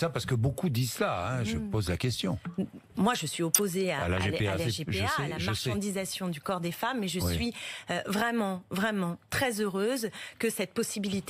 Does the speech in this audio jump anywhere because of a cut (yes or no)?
no